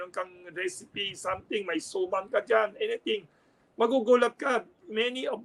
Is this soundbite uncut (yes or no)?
yes